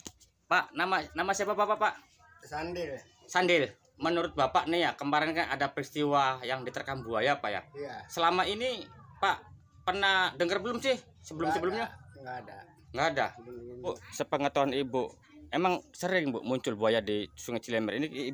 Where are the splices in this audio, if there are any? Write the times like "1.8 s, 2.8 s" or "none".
3.9 s, 13.9 s